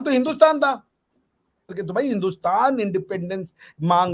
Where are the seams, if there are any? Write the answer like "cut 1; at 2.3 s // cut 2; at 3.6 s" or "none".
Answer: cut 1; at 1.7 s

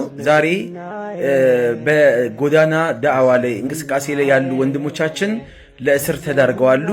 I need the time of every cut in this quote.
none

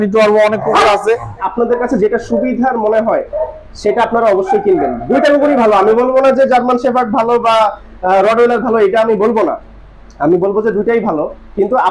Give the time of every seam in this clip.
cut 1; at 1.4 s

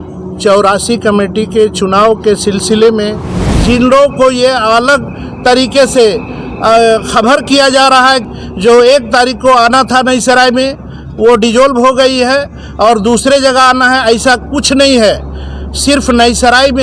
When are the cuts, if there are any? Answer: cut 1; at 3.6 s // cut 2; at 8.2 s

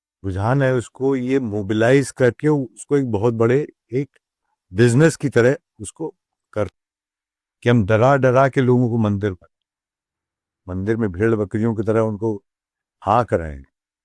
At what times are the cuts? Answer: cut 1; at 6.7 s

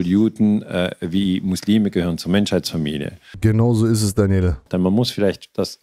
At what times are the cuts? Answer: cut 1; at 3.3 s // cut 2; at 4.6 s

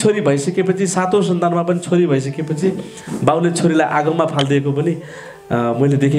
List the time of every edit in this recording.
none

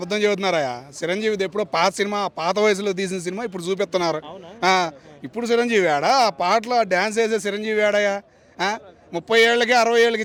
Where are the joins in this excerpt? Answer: none

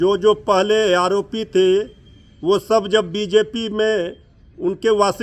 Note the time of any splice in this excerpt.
none

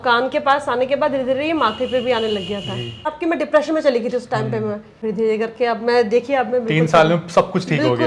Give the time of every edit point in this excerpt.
cut 1; at 3.1 s // cut 2; at 4.9 s

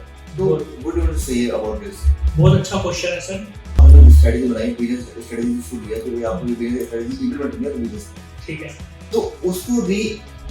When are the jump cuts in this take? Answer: cut 1; at 3.8 s

